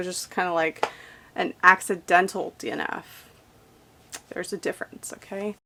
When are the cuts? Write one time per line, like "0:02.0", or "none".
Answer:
none